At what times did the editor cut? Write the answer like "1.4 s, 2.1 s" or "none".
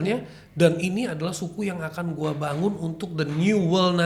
none